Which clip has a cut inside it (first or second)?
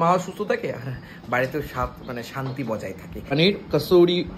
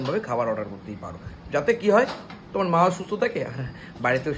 first